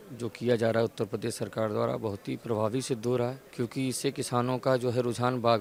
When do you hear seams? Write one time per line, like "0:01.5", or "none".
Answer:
none